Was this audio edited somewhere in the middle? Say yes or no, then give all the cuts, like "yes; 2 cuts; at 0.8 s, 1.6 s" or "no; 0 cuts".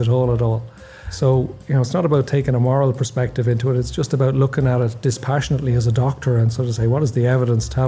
no; 0 cuts